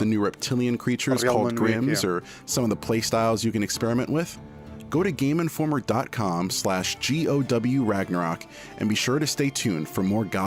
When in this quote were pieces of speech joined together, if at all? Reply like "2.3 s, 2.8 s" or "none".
none